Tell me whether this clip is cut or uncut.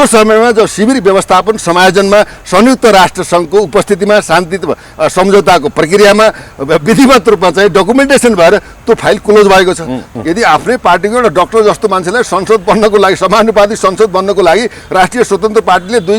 cut